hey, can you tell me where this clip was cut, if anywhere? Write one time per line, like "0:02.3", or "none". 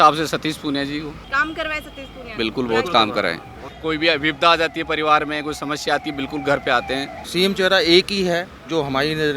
0:01.2
0:03.7
0:07.2

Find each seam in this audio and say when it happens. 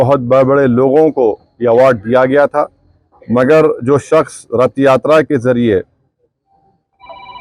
none

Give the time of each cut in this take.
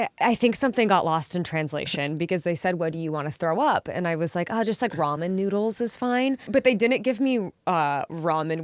0:06.5

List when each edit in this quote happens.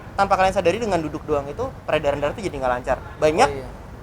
none

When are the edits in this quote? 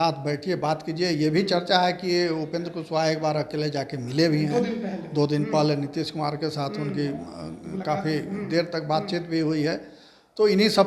none

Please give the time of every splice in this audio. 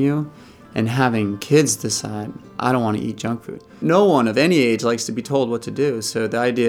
0:02.5
0:03.8

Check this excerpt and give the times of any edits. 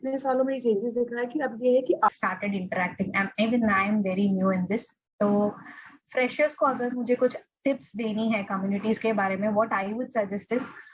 0:02.1

